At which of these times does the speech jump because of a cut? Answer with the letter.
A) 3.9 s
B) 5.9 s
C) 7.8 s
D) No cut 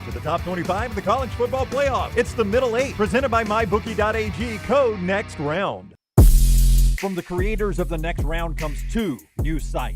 B